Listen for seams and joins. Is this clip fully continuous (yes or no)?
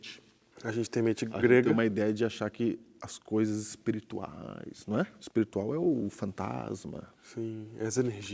no